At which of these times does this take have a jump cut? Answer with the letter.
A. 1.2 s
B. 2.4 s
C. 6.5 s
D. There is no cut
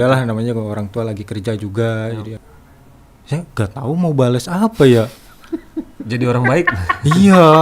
B